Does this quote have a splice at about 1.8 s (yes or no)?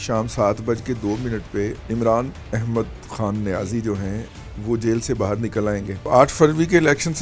yes